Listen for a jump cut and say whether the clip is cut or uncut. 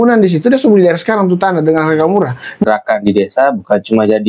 cut